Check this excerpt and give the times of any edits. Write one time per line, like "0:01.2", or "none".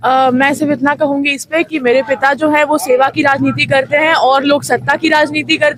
none